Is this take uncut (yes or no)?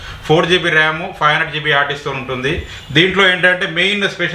yes